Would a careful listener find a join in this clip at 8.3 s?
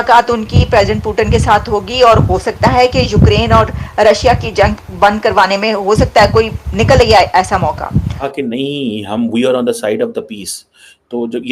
yes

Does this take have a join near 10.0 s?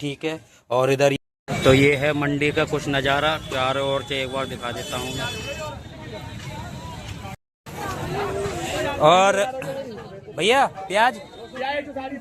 no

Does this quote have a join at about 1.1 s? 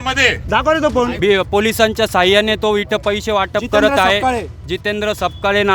yes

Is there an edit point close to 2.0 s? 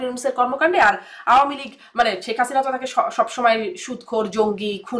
no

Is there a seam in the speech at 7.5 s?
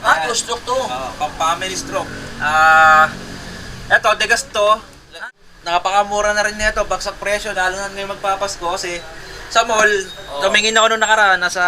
no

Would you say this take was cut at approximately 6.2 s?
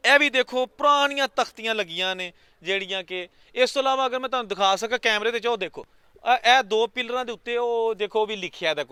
no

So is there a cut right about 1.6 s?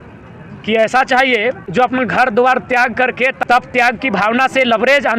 yes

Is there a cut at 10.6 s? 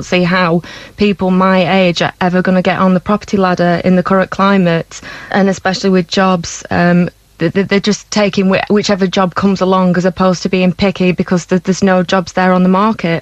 no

